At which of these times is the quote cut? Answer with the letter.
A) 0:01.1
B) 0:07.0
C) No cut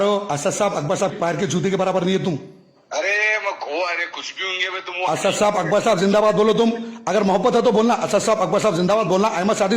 A